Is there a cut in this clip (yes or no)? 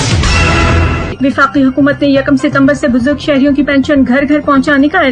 no